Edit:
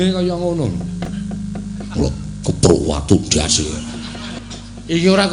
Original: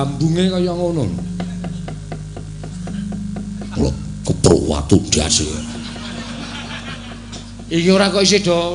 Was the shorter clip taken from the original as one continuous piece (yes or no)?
no